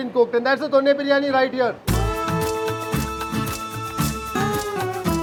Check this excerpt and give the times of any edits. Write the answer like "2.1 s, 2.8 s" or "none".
none